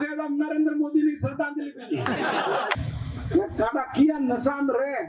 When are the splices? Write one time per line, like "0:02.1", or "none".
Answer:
0:02.8